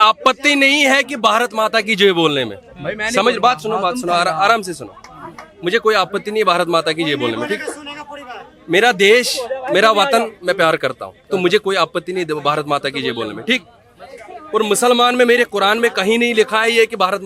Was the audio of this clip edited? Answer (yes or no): no